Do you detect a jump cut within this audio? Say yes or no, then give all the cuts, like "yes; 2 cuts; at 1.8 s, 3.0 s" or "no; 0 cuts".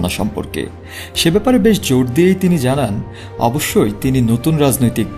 no; 0 cuts